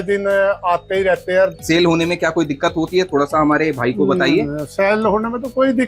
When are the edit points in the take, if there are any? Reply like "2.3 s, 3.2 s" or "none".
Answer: 1.5 s